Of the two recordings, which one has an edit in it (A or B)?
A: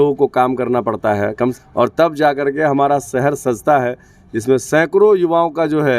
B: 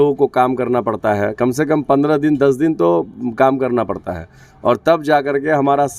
A